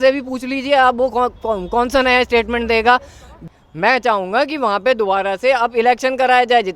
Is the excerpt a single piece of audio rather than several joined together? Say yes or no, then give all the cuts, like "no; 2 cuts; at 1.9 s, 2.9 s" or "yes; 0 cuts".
no; 1 cut; at 3.4 s